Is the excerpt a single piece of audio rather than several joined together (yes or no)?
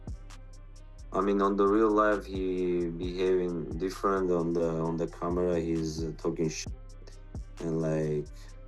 yes